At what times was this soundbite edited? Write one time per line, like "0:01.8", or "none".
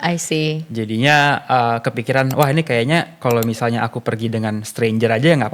none